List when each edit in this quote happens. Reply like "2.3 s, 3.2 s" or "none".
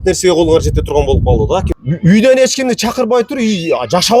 1.7 s